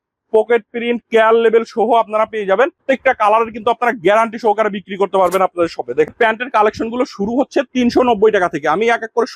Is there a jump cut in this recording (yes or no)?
yes